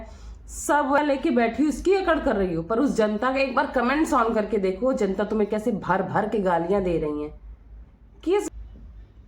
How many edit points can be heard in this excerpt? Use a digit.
2